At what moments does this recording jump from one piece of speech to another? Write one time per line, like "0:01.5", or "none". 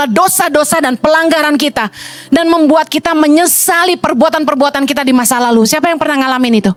none